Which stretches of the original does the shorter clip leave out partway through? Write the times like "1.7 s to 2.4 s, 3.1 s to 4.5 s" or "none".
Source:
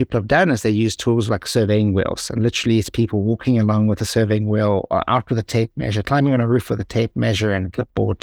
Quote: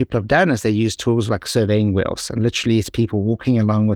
none

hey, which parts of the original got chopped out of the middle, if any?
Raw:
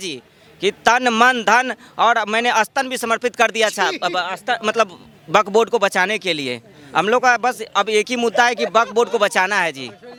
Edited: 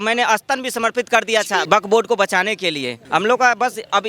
3.9 s to 5.3 s, 6.6 s to 6.8 s

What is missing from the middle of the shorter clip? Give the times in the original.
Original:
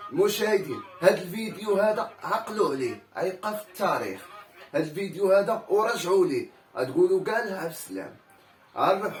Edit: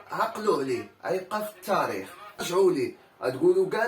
4.6 s to 6.0 s

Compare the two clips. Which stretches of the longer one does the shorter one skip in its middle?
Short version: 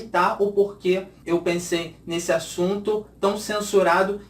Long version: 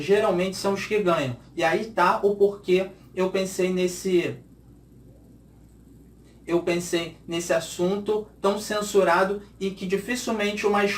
3.0 s to 6.4 s

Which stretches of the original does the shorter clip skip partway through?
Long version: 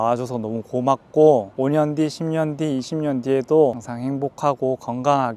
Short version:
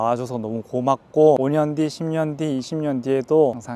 1.4 s to 1.6 s

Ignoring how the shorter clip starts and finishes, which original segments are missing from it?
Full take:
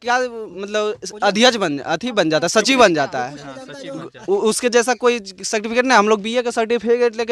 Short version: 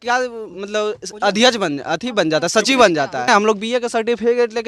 3.3 s to 5.9 s

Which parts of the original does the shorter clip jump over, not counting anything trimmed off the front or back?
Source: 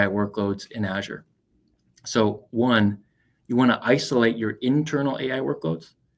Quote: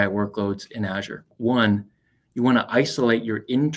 1.3 s to 2.4 s

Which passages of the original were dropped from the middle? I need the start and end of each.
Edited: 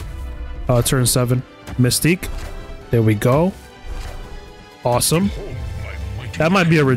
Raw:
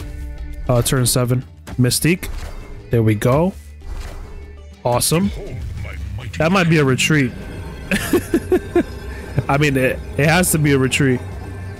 none

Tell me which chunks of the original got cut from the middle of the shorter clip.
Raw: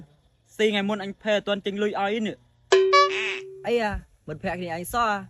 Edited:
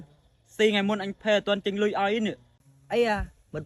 2.5 s to 3.3 s

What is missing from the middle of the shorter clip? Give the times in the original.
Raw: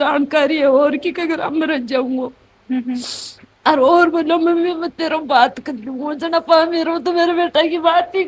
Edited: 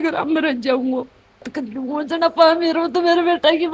2.7 s to 5.5 s

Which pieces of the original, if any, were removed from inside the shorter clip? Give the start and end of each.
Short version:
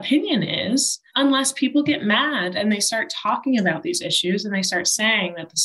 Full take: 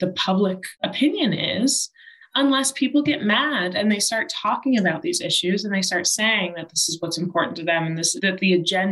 1.9 s to 2.2 s

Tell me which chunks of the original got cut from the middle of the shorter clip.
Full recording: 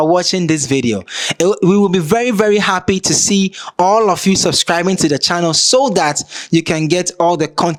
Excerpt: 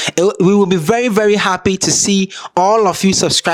none

